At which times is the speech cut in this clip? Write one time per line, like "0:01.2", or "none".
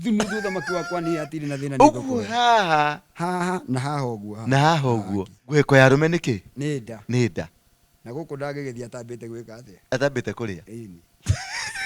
0:05.4